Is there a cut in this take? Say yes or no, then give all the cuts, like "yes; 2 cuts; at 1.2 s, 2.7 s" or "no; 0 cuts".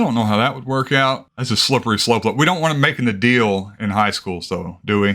yes; 1 cut; at 1.2 s